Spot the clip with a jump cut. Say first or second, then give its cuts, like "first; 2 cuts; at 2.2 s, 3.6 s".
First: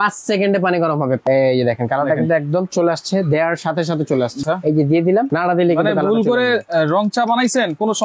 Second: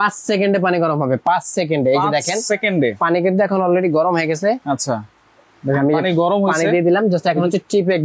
first; 2 cuts; at 1.2 s, 4.4 s